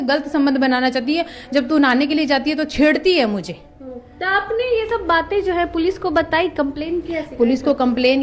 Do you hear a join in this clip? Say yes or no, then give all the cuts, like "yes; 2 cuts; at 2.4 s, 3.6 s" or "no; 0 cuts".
no; 0 cuts